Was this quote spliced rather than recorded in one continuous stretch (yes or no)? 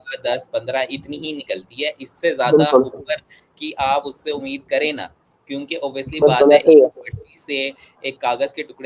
no